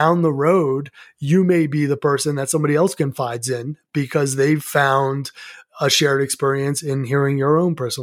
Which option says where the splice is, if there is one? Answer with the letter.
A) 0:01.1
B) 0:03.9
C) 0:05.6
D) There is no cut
D